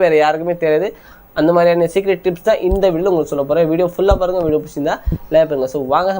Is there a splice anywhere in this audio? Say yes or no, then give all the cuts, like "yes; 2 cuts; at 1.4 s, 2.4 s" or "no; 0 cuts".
yes; 1 cut; at 1.1 s